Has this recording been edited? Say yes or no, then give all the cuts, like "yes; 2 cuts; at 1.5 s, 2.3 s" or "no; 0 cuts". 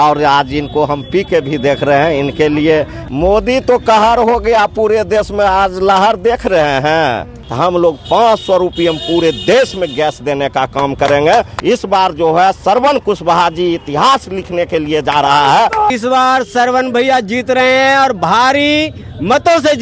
yes; 4 cuts; at 3.0 s, 7.4 s, 11.5 s, 16.0 s